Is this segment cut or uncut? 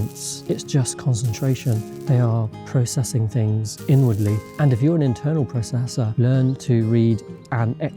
cut